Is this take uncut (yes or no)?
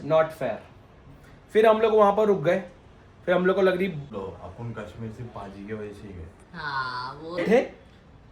no